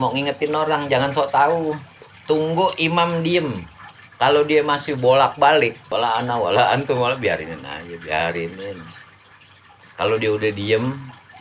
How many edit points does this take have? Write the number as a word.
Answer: one